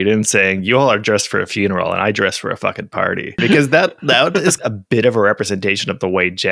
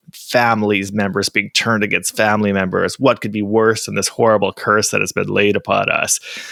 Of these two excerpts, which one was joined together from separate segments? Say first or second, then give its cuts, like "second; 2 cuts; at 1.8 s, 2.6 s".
first; 2 cuts; at 3.4 s, 4.6 s